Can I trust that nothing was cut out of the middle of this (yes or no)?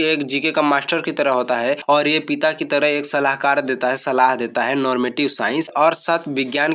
no